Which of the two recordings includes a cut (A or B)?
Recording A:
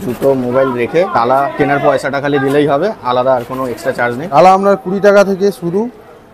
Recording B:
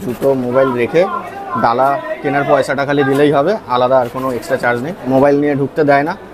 A